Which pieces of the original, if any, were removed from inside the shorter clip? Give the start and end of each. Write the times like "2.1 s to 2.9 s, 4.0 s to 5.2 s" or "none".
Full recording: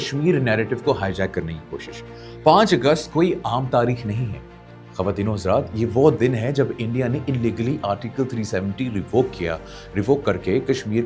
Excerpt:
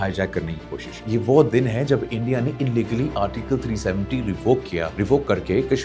2.0 s to 5.7 s, 9.6 s to 9.9 s

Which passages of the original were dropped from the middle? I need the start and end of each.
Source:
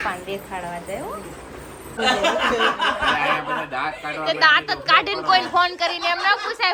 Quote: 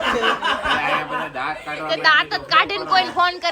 none

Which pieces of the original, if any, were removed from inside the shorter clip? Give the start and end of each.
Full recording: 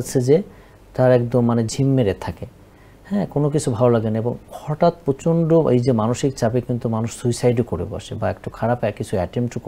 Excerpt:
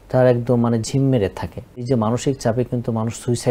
2.7 s to 5.8 s

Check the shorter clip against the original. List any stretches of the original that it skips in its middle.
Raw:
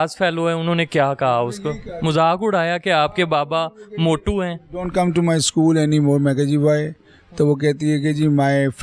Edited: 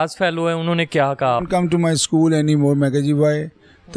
1.4 s to 4.8 s

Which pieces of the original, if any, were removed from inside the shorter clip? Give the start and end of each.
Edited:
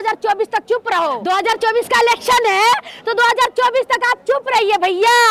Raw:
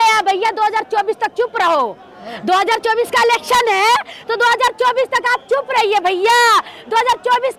1.9 s to 2.4 s

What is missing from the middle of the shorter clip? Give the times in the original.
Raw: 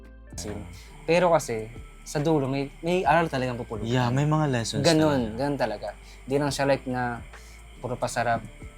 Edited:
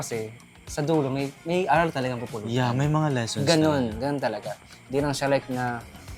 none

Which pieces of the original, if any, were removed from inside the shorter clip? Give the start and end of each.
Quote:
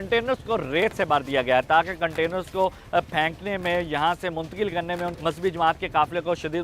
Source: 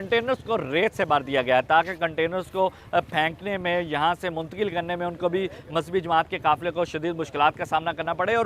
5.1 s to 5.6 s

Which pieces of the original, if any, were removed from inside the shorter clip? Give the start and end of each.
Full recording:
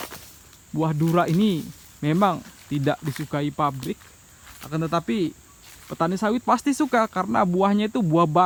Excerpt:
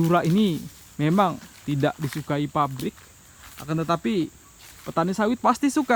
none

